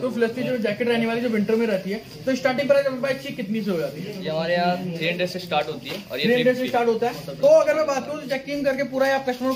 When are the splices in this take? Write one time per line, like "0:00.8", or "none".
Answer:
0:07.2